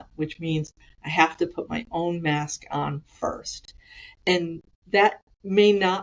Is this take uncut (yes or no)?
yes